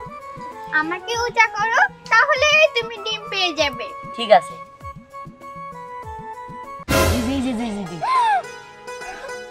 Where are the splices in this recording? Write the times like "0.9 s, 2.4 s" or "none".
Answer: none